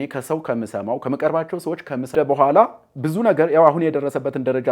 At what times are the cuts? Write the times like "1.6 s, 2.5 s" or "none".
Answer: 2.1 s